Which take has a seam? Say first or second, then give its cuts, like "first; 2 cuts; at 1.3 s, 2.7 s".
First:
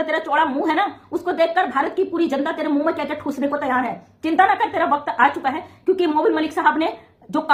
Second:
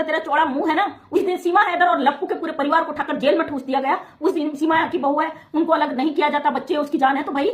second; 2 cuts; at 1.0 s, 4.3 s